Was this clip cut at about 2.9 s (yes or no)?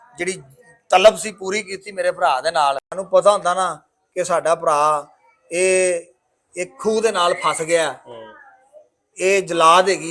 yes